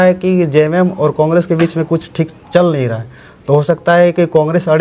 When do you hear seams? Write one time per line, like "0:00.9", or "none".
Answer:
none